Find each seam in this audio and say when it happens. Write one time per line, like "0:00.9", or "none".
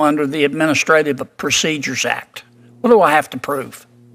none